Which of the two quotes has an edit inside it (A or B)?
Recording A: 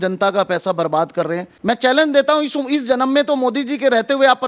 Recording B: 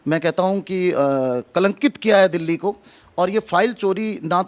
A